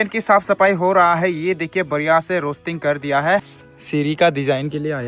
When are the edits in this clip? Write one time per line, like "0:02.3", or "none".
0:03.5

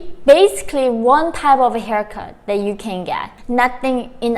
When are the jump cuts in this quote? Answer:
0:03.3

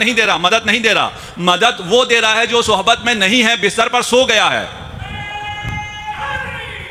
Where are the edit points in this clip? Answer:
none

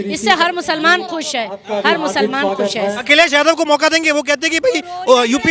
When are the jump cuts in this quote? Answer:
none

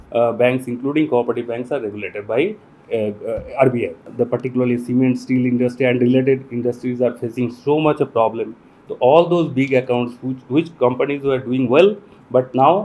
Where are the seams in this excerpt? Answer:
0:04.0

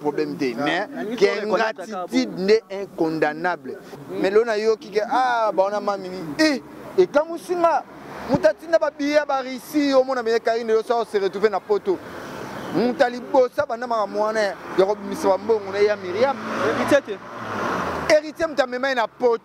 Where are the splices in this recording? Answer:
0:03.9

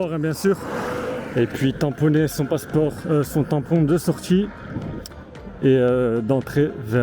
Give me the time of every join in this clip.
none

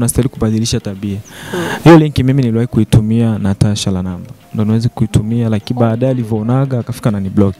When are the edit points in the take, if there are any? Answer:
none

